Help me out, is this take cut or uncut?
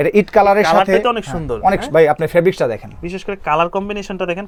uncut